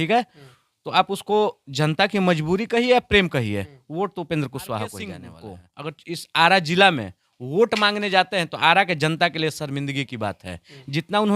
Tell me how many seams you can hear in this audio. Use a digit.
1